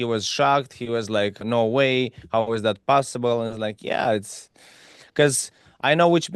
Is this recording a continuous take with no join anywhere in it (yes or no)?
no